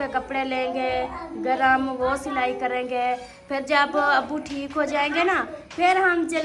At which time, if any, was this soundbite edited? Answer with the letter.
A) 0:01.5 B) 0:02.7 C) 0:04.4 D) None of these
D